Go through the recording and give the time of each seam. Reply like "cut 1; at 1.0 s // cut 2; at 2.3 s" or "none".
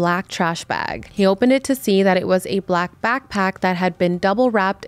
none